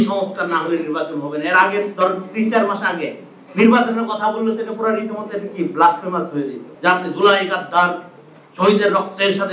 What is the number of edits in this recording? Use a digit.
1